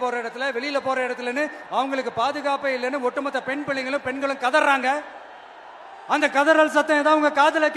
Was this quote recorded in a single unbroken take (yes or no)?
yes